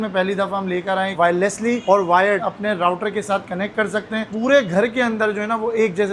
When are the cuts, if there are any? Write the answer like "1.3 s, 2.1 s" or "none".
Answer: 1.1 s, 2.5 s, 4.3 s